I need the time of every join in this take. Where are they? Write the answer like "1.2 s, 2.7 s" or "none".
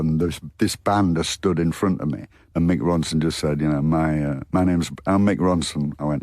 2.3 s